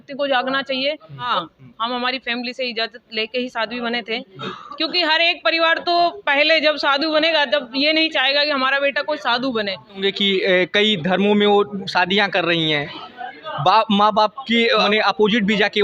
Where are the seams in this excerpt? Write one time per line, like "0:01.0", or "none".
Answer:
0:01.3
0:10.0
0:14.9